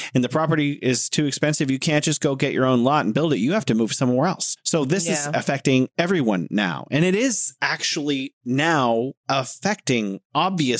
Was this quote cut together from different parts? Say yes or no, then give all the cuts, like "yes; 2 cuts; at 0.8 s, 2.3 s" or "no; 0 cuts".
no; 0 cuts